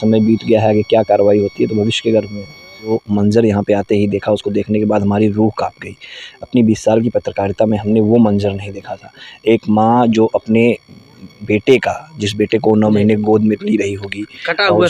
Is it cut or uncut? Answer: cut